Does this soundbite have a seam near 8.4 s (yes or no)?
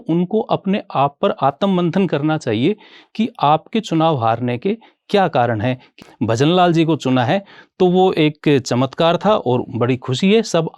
no